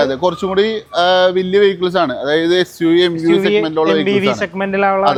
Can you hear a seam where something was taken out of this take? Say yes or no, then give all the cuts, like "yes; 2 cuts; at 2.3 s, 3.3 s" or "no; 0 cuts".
no; 0 cuts